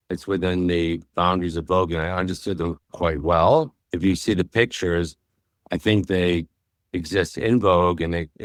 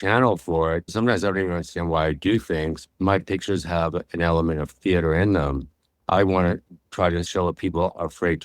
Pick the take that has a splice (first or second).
second